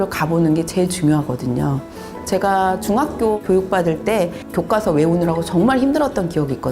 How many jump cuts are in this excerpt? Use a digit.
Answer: 2